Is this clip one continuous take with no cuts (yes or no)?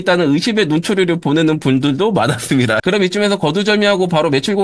no